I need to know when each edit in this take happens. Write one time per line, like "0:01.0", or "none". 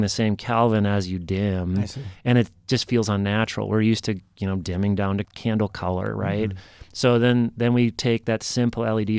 0:05.3